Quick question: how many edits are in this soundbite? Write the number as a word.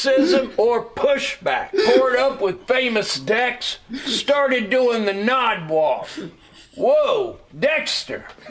zero